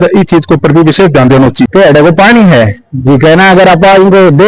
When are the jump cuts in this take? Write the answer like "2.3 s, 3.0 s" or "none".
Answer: 1.7 s